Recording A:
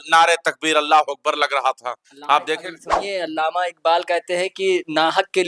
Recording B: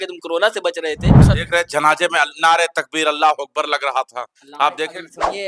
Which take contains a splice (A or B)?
B